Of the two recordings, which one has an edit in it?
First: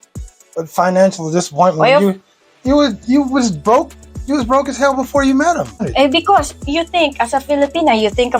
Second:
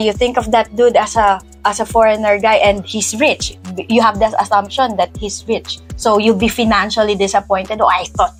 first; 1 cut; at 5.9 s

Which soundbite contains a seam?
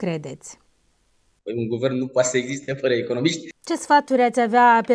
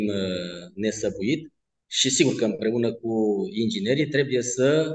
first; 1 cut; at 3.5 s

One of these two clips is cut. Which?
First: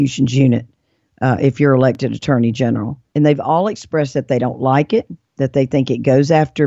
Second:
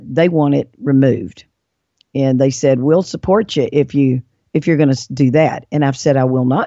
first; 1 cut; at 3.0 s

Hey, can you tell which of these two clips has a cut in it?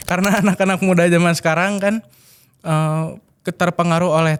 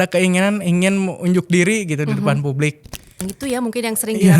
second; 1 cut; at 3.2 s

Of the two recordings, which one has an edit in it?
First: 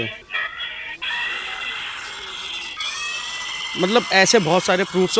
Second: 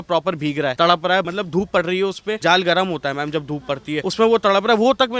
second; 4 cuts; at 0.7 s, 1.3 s, 2.4 s, 4.0 s

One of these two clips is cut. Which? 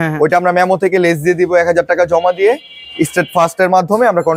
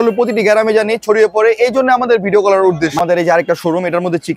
second; 1 cut; at 2.9 s

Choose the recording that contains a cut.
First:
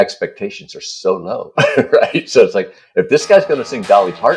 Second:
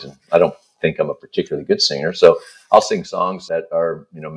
second; 1 cut; at 3.4 s

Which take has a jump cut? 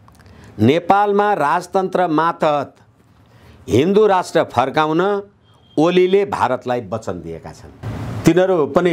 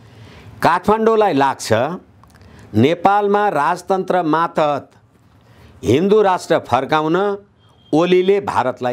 first; 1 cut; at 7.7 s

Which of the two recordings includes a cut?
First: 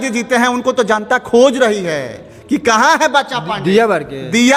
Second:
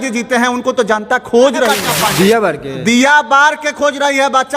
second; 1 cut; at 1.8 s

